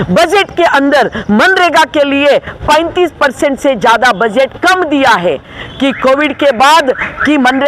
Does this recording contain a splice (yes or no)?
no